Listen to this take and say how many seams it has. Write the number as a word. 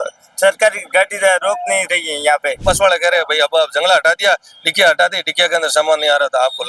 one